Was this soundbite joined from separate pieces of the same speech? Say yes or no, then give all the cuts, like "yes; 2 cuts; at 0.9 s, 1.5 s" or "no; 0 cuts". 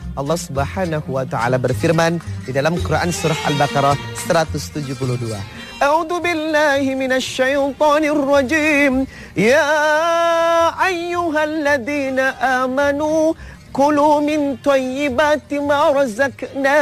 yes; 1 cut; at 2.4 s